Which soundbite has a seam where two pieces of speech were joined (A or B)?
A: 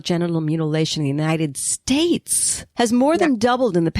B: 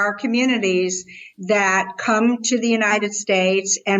A